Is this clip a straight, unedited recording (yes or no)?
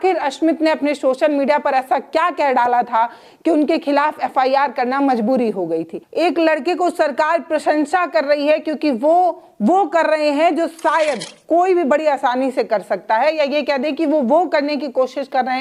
no